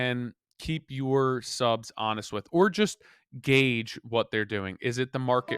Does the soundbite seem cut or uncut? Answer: uncut